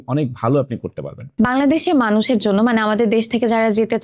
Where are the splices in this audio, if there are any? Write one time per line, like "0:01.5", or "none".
0:01.3